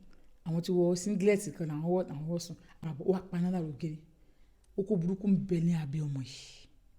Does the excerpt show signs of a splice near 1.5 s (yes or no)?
no